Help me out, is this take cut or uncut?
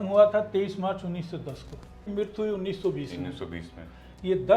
cut